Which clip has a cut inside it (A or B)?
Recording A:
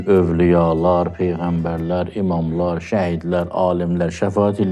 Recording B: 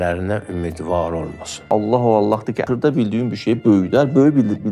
B